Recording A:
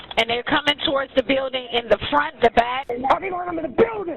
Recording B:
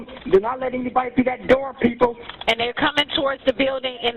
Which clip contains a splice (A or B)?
A